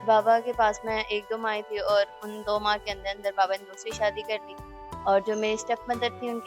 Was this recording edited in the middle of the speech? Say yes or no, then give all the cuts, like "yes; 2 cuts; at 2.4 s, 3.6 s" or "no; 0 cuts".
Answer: no; 0 cuts